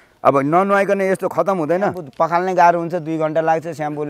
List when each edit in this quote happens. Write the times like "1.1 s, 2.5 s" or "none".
2.0 s